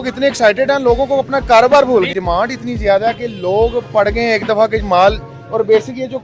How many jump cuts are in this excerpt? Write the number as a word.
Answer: one